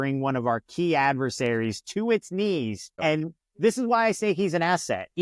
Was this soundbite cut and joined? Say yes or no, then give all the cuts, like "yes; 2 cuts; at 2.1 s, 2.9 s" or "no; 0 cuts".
yes; 1 cut; at 2.8 s